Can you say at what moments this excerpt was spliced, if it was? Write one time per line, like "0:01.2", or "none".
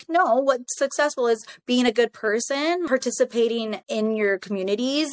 0:02.9